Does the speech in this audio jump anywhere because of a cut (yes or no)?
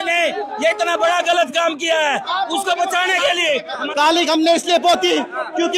yes